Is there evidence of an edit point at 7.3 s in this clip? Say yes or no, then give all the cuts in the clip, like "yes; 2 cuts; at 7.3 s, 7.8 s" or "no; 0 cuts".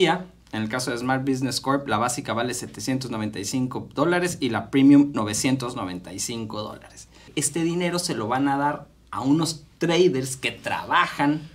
yes; 1 cut; at 7.3 s